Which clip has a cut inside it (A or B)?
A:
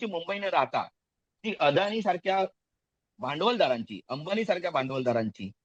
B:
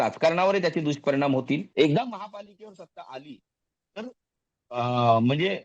B